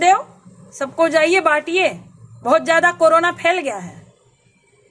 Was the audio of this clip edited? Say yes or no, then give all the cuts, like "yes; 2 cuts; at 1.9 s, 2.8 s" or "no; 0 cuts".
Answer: no; 0 cuts